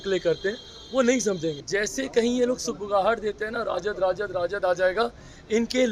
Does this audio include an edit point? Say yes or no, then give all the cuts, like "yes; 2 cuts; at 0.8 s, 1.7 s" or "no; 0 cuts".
yes; 1 cut; at 1.6 s